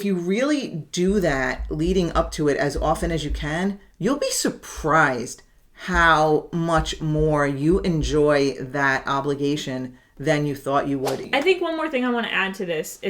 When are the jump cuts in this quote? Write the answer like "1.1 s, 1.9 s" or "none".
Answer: 3.9 s, 11.2 s